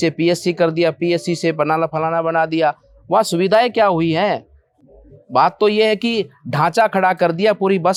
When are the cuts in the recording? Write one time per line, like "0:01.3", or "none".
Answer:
none